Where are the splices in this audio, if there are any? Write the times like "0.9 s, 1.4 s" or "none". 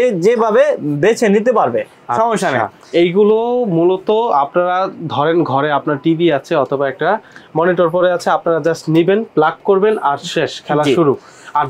none